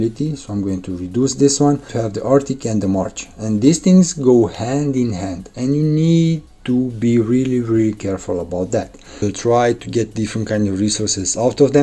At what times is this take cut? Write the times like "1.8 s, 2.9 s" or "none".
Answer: 1.9 s, 9.2 s